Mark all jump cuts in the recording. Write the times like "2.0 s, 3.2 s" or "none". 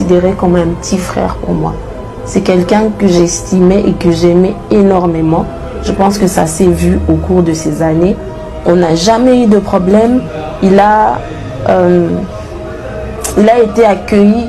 none

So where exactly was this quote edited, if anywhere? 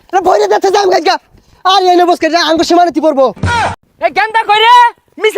3.7 s

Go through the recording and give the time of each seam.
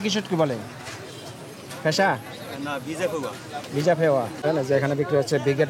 4.4 s

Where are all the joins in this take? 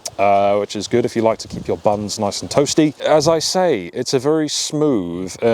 3.0 s

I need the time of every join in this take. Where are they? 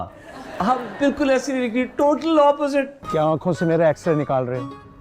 3.0 s

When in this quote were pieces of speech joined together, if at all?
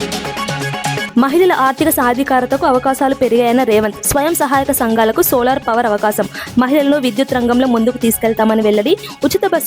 1.0 s

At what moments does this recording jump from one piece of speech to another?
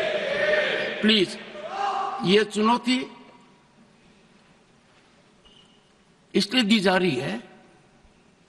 none

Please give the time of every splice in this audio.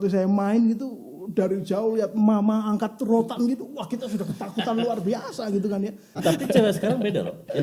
6.2 s

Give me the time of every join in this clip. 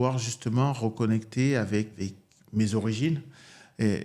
1.9 s

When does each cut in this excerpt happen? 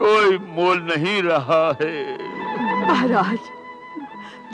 2.5 s

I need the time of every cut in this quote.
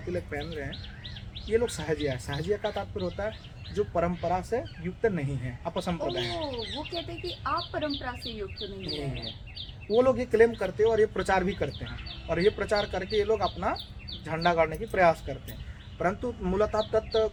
none

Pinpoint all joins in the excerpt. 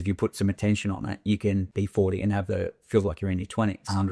1.7 s

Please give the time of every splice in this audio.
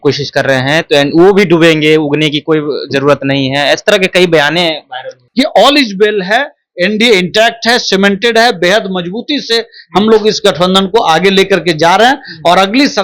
5.2 s

